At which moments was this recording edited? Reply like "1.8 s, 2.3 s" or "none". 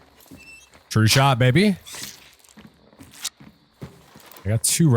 3.9 s